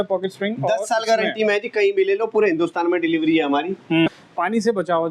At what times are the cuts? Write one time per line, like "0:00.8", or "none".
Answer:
0:04.1

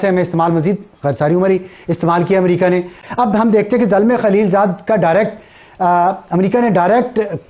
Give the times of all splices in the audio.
0:03.0

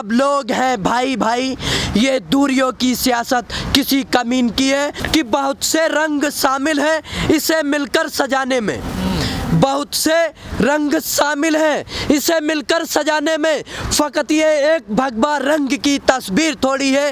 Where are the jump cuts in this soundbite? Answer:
0:05.0

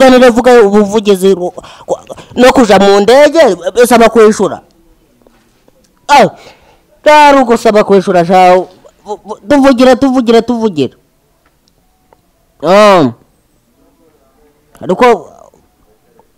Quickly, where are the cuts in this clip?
none

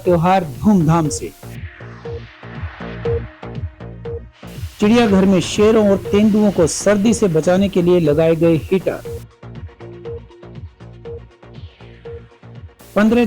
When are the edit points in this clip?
0:01.4

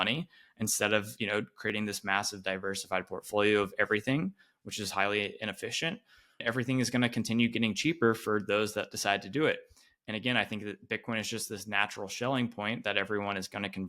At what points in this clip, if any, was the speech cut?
0:06.4

